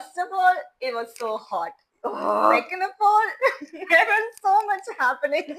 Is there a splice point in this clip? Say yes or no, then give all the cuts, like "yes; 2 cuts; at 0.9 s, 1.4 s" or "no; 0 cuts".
no; 0 cuts